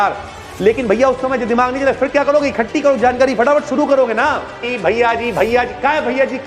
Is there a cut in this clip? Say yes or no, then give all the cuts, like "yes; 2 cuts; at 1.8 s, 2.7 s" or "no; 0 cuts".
yes; 1 cut; at 4.7 s